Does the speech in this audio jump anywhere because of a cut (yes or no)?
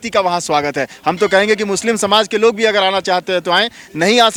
no